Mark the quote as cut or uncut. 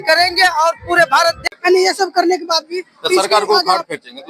cut